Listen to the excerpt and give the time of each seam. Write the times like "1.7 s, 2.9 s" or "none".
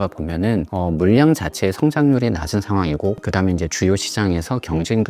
none